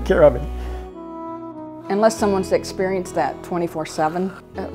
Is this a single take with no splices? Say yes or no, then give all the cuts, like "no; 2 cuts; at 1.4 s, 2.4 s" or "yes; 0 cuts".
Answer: no; 1 cut; at 1.2 s